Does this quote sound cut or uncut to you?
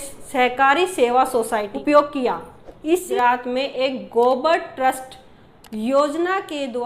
cut